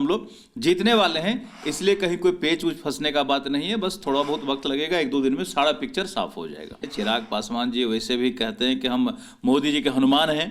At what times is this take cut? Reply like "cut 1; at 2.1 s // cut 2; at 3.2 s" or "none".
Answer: cut 1; at 6.9 s